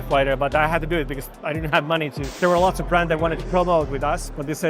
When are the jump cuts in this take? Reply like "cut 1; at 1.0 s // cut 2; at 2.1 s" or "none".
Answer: cut 1; at 2.4 s